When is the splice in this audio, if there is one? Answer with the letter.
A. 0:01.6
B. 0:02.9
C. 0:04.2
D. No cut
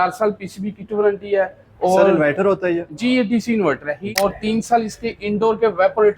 C